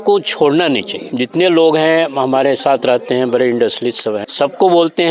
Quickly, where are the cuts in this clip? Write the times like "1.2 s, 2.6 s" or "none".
1.0 s, 4.3 s